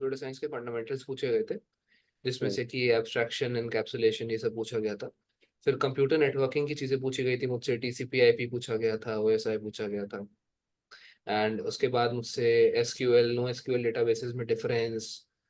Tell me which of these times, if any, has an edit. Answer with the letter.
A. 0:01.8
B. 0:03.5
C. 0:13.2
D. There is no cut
D